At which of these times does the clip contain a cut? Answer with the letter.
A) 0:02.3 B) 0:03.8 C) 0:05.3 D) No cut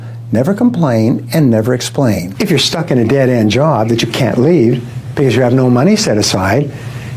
A